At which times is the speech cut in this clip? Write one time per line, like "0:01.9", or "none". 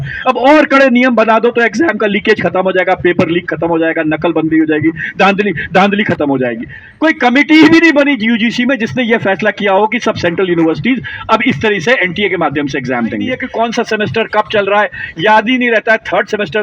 0:06.8
0:13.4

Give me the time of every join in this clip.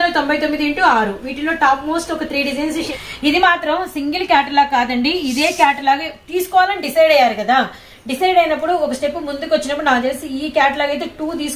0:02.9

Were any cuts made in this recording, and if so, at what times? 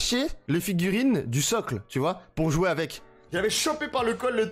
0:03.3

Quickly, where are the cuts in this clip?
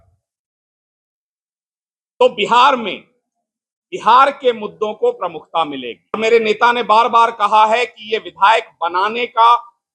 0:06.2

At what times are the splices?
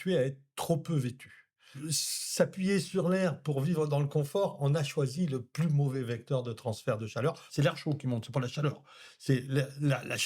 0:01.8
0:07.4

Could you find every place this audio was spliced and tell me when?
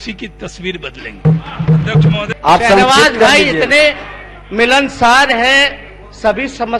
0:02.3

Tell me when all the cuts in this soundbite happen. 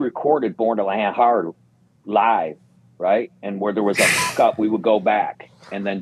none

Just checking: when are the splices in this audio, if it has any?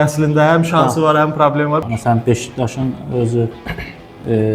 0:01.8

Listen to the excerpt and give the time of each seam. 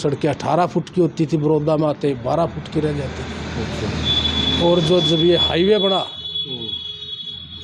none

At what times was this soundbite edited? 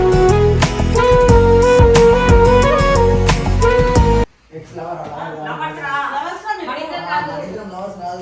0:04.4

